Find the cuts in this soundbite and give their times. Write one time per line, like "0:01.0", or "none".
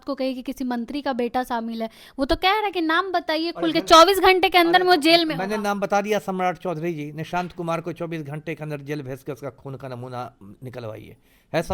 none